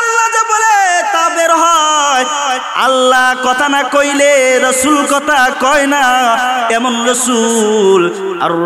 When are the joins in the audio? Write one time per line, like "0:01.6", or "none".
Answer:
none